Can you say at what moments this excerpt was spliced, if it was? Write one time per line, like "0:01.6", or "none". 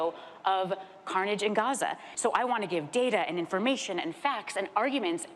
0:02.1